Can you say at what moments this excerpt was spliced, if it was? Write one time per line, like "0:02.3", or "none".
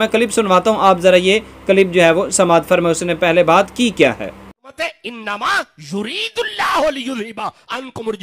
none

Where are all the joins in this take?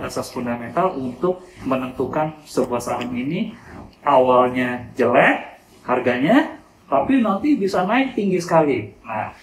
none

